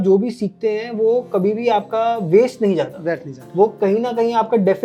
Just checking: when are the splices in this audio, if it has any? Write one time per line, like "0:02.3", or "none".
none